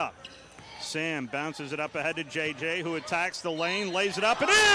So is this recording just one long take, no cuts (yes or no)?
yes